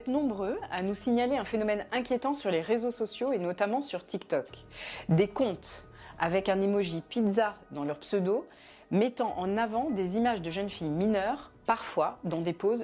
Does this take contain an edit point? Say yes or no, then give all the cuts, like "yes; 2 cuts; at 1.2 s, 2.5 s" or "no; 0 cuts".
no; 0 cuts